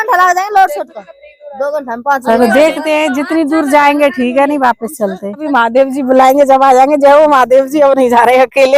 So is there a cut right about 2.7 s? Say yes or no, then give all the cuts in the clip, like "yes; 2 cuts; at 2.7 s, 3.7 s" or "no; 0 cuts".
no; 1 cut; at 5.4 s